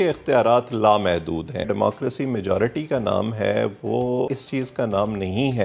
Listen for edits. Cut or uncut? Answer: cut